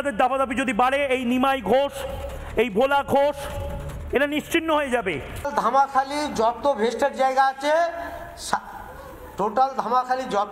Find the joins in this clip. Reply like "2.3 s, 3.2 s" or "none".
5.5 s